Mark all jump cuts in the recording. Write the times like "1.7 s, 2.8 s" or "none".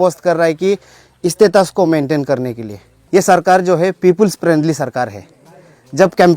2.9 s